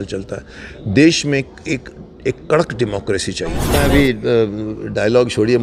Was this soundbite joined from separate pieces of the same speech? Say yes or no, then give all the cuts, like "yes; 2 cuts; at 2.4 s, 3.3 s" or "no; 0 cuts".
yes; 1 cut; at 3.6 s